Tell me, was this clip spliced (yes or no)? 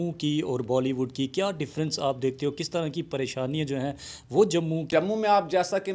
yes